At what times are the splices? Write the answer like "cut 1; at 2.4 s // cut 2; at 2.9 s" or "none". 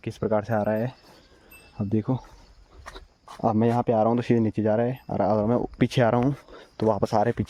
none